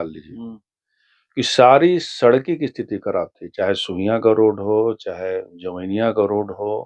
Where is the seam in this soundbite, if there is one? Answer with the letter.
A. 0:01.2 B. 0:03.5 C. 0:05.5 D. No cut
D